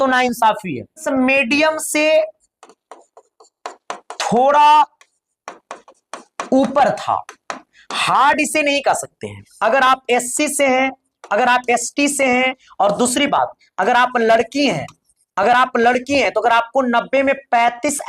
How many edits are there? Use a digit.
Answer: 3